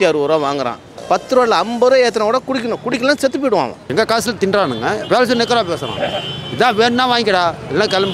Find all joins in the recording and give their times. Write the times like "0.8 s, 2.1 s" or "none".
1.0 s, 3.8 s